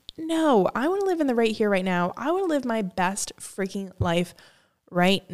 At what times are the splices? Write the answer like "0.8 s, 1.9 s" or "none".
none